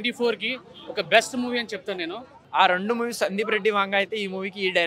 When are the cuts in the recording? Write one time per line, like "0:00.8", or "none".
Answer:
0:02.3